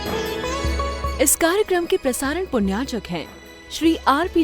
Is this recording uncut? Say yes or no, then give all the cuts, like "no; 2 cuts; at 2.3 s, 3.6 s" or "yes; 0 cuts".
no; 1 cut; at 1.1 s